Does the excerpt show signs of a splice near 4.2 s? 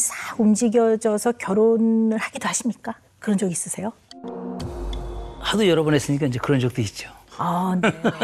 yes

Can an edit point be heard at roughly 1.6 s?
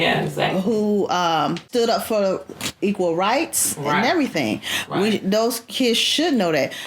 yes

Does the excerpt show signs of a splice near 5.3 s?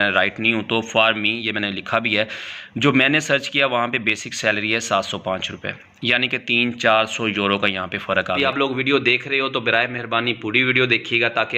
no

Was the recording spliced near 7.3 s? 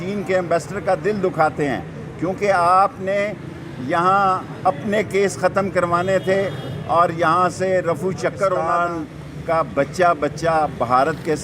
no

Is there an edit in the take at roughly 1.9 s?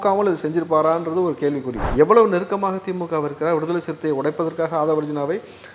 yes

